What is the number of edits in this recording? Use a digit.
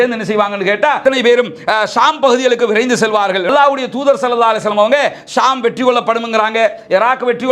2